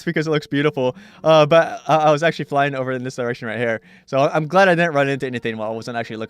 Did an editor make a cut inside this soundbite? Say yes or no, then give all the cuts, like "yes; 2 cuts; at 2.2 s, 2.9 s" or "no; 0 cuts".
yes; 1 cut; at 1.3 s